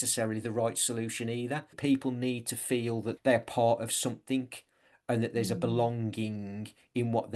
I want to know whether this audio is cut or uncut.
cut